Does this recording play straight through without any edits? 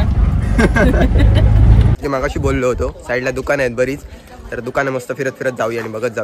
no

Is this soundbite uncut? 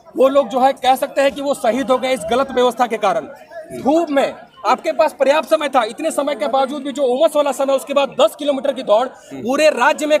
yes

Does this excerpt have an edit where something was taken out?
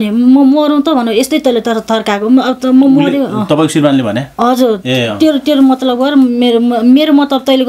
no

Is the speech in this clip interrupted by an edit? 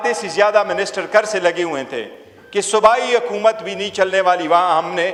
no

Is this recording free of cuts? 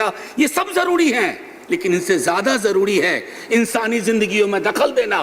yes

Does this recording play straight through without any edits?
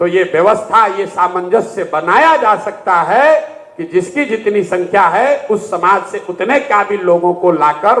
yes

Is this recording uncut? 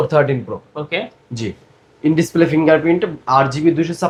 yes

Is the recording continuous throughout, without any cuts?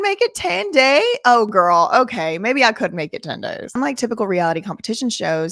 no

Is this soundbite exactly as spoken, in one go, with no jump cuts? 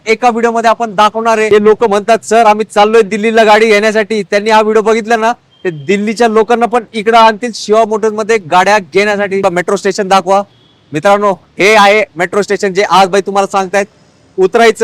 no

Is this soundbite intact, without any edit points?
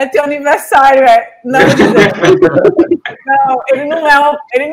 yes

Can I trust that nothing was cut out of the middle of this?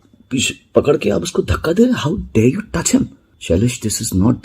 no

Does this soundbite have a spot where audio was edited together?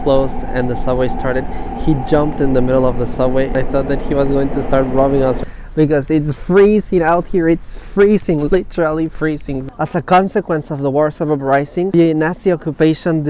yes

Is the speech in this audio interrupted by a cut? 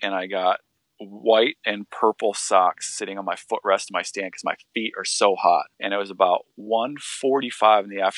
yes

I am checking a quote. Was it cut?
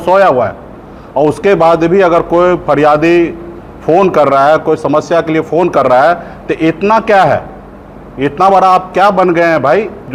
no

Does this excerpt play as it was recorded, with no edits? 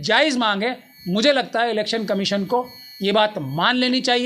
yes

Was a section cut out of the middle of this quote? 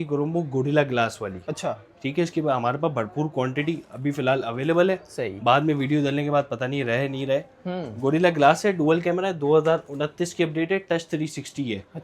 no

